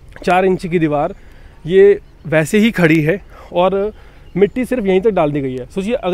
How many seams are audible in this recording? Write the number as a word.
zero